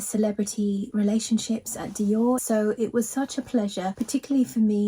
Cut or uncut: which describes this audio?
cut